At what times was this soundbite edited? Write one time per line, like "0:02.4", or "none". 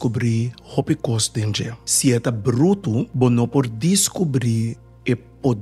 0:01.8
0:03.1